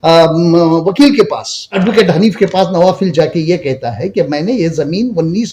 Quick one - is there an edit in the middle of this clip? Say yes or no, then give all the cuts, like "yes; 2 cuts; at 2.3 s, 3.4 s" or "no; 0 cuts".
yes; 1 cut; at 1.8 s